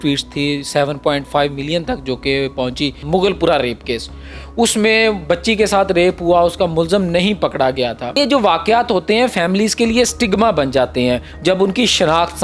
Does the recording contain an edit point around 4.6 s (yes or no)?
no